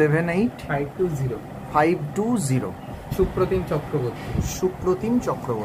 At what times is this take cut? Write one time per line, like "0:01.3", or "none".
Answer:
0:03.0